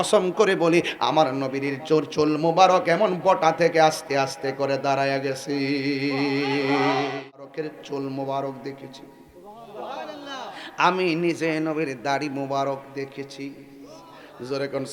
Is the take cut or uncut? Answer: cut